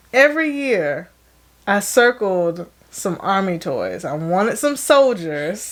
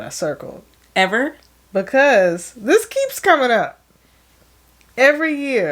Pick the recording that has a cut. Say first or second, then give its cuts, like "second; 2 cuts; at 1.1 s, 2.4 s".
second; 1 cut; at 1.5 s